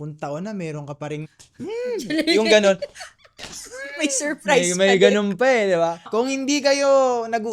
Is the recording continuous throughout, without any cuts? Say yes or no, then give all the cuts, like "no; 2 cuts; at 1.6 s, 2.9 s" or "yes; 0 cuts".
no; 2 cuts; at 1.3 s, 6.1 s